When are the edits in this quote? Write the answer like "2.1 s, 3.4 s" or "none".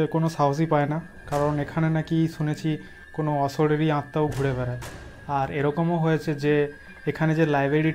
none